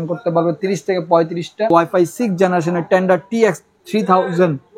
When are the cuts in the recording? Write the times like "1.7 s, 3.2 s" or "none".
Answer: 1.7 s